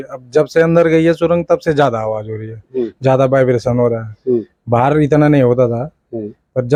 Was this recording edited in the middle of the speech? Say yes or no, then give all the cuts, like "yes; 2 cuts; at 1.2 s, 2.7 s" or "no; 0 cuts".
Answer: no; 0 cuts